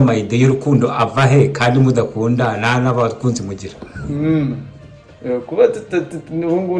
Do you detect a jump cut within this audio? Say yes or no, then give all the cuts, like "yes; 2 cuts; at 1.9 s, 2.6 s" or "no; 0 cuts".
no; 0 cuts